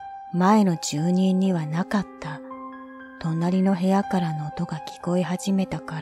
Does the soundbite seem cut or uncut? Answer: uncut